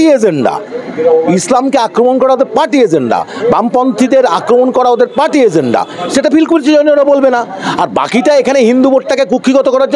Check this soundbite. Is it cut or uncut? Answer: uncut